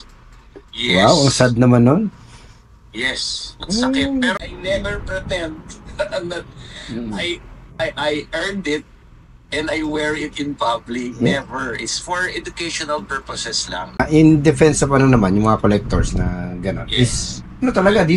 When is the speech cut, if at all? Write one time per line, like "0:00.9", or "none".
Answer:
0:04.4
0:14.0